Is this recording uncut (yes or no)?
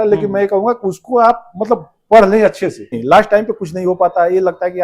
no